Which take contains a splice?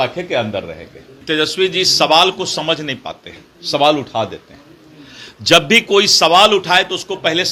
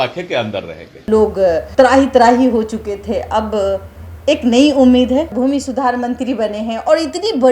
second; 2 cuts; at 1.1 s, 5.3 s

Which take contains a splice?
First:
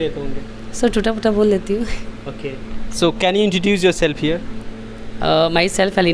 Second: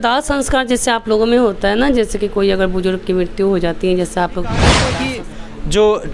second; 1 cut; at 4.9 s

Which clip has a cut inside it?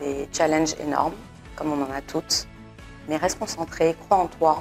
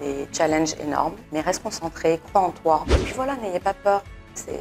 second; 2 cuts; at 1.2 s, 3.0 s

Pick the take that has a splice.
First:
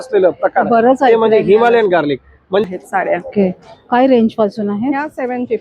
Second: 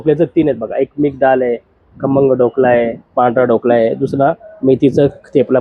first; 1 cut; at 2.6 s

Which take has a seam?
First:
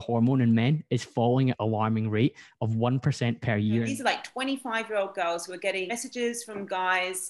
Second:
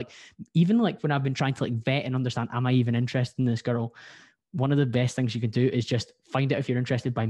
first; 3 cuts; at 1.6 s, 3.9 s, 5.9 s

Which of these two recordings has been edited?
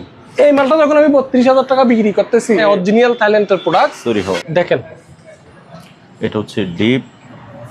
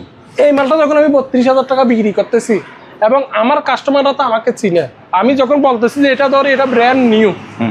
first; 2 cuts; at 2.6 s, 4.4 s

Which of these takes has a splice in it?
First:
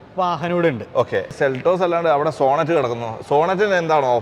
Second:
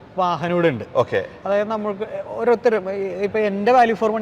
first; 1 cut; at 1.3 s

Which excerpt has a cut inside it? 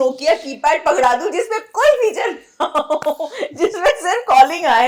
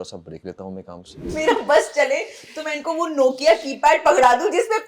second; 1 cut; at 1.1 s

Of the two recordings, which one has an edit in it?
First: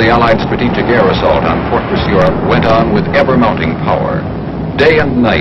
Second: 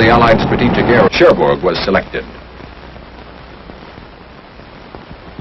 first; 1 cut; at 1.1 s

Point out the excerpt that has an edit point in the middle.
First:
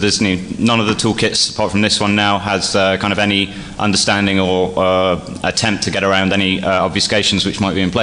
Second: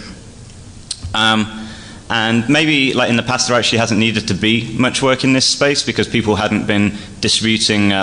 first; 1 cut; at 4.7 s

